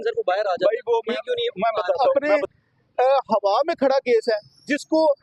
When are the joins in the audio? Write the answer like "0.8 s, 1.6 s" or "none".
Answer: 2.3 s